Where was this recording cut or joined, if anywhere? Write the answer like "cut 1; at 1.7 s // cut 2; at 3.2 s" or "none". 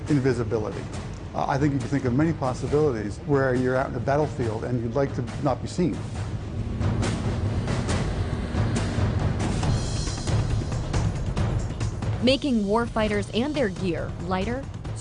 cut 1; at 1.2 s

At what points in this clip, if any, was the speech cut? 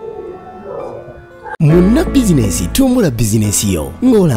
cut 1; at 1.4 s

